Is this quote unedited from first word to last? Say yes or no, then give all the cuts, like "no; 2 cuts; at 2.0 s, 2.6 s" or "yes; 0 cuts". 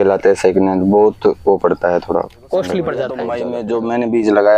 no; 1 cut; at 3.5 s